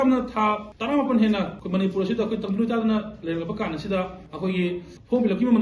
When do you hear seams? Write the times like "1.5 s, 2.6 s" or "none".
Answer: 1.6 s, 4.2 s